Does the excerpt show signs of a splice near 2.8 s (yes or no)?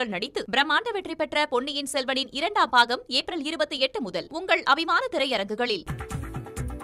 no